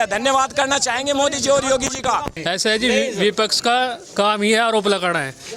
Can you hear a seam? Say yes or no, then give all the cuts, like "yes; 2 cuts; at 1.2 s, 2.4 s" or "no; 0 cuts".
yes; 1 cut; at 2.3 s